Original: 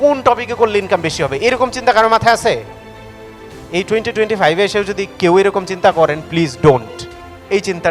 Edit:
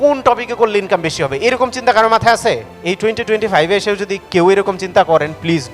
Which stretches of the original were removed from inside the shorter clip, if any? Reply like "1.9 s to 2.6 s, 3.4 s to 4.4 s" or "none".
2.7 s to 3.6 s